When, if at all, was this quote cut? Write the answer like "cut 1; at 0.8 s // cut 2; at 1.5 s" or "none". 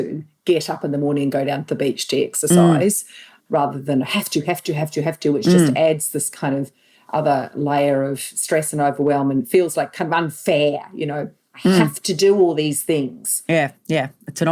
cut 1; at 3.3 s